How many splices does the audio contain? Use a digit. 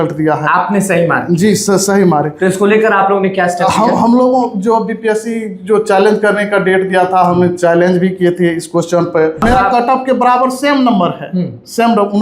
1